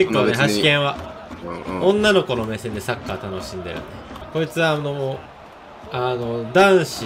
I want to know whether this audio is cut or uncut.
cut